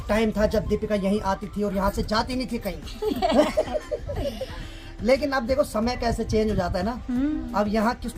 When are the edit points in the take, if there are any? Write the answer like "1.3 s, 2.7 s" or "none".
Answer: none